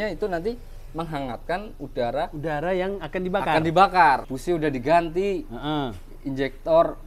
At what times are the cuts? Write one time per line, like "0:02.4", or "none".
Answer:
0:04.3